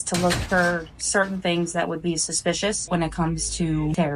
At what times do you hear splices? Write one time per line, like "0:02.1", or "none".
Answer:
0:02.8